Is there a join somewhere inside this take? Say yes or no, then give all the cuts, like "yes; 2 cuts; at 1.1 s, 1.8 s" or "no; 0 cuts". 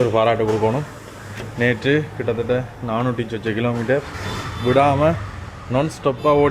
no; 0 cuts